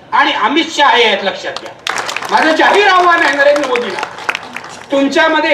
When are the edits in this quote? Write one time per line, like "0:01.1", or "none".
0:01.9